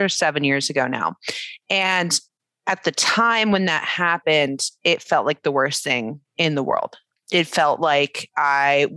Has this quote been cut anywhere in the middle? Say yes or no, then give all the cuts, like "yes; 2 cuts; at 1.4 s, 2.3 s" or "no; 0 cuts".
yes; 1 cut; at 7.0 s